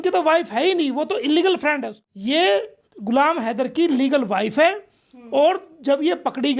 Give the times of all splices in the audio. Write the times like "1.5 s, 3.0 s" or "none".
1.9 s